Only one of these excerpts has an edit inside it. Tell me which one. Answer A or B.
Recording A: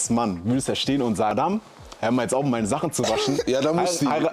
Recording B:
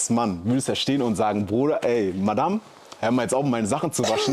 A